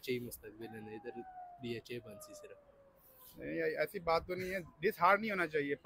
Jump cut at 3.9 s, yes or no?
yes